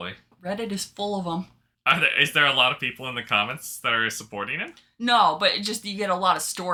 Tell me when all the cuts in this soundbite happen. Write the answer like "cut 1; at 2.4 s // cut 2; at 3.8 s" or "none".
none

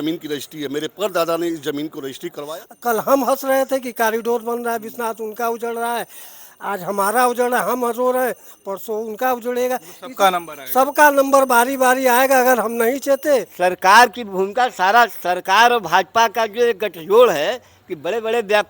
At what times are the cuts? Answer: cut 1; at 2.4 s // cut 2; at 13.5 s

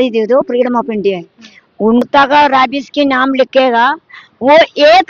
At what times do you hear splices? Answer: cut 1; at 2.0 s

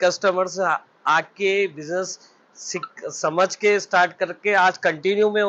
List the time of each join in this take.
none

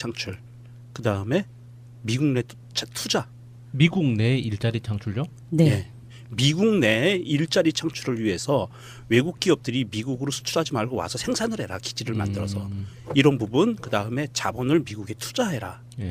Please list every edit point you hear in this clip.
none

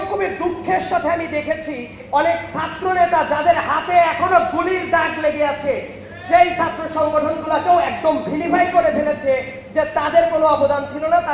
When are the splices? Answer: cut 1; at 2.0 s

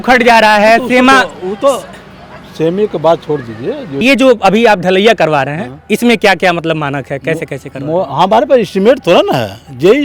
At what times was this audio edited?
cut 1; at 4.0 s

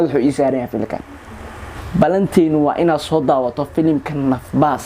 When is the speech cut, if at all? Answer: cut 1; at 1.8 s

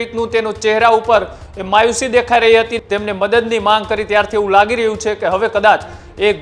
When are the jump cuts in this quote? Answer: cut 1; at 2.8 s

